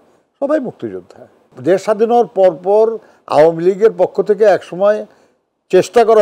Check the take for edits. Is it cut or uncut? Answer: cut